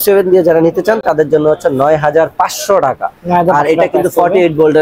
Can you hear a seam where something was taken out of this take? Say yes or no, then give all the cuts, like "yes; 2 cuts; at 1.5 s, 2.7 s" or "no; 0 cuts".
no; 0 cuts